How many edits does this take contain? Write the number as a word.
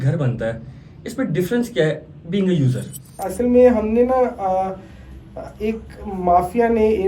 one